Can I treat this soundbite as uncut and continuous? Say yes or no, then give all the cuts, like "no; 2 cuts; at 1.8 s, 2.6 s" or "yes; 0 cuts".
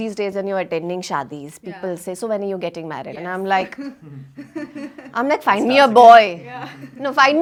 yes; 0 cuts